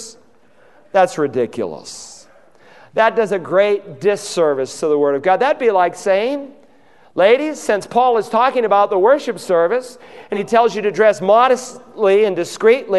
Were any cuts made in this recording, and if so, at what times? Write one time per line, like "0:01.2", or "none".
0:10.3